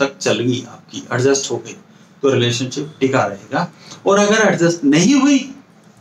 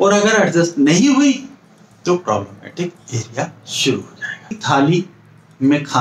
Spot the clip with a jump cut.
second; 1 cut; at 4.6 s

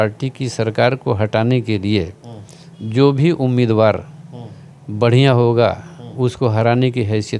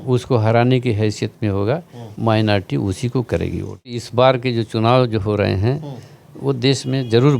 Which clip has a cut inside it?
second; 1 cut; at 4.0 s

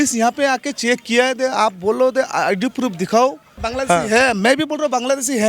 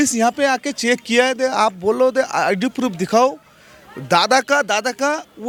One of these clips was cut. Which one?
first; 1 cut; at 3.6 s

